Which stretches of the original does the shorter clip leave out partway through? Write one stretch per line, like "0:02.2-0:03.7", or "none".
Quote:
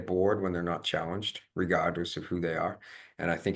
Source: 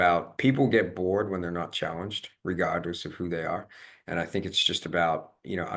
none